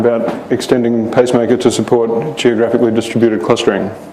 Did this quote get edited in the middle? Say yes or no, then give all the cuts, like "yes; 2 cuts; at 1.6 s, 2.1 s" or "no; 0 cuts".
no; 0 cuts